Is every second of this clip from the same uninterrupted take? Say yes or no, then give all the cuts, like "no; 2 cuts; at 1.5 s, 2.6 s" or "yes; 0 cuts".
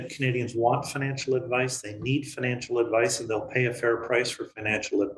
yes; 0 cuts